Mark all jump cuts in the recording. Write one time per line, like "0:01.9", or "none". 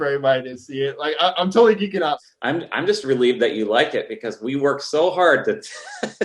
0:02.2